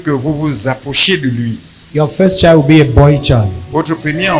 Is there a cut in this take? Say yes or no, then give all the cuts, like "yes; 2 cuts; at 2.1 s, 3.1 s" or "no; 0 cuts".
yes; 1 cut; at 1.7 s